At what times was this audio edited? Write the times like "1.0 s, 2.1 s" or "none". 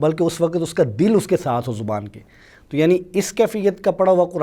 none